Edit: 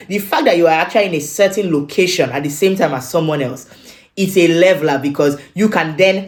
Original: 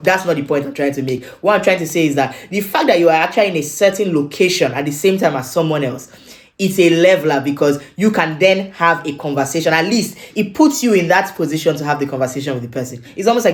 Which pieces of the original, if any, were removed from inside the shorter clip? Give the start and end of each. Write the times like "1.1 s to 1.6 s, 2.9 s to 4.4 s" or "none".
none

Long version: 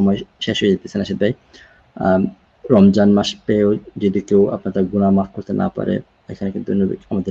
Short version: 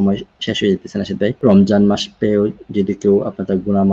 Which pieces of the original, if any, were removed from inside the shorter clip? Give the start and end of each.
1.4 s to 2.6 s

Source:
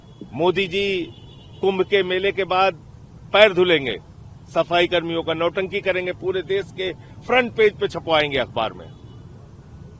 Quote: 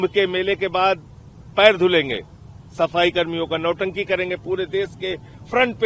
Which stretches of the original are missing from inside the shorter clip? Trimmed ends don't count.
none

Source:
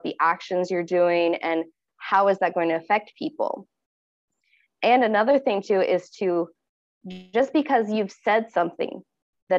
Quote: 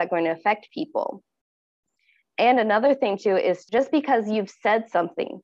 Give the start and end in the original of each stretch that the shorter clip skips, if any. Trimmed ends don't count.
6.1 s to 7.3 s

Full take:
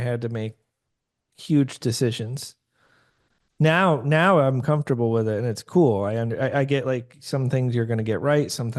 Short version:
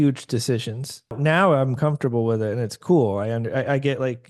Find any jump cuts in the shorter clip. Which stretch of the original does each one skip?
2.7 s to 4.0 s

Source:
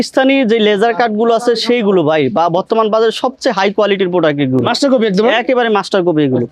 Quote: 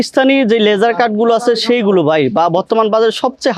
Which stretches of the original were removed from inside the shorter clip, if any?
none

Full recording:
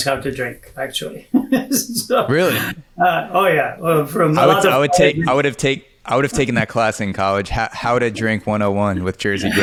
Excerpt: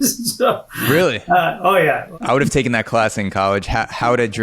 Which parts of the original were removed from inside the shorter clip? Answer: 3.8 s to 5.9 s

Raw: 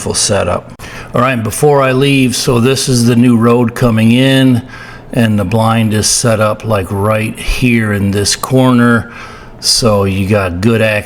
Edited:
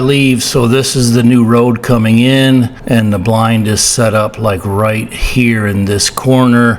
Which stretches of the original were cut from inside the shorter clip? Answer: 4.7 s to 5.0 s

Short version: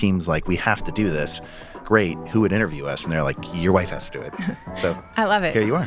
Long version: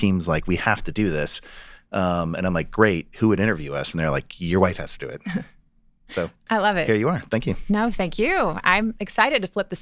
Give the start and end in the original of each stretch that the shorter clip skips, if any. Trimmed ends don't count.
1.8 s to 2.7 s, 5.5 s to 6.0 s

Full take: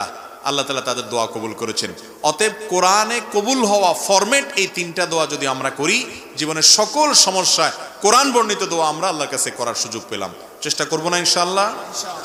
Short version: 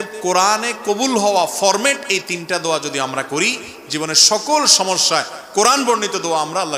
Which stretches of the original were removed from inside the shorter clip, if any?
none

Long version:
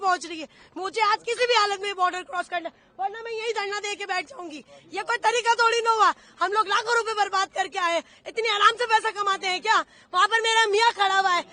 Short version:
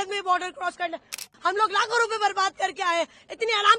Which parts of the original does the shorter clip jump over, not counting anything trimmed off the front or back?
2.9 s to 6.2 s

